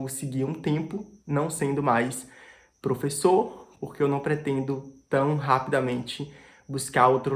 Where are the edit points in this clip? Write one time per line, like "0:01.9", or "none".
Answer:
none